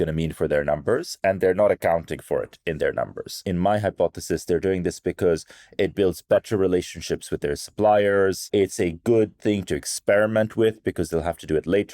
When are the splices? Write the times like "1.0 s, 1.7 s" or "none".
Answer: 3.4 s, 8.5 s